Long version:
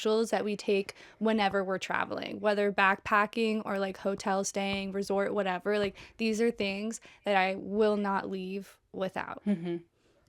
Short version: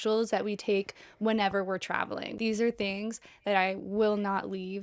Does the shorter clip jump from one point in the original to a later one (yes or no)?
yes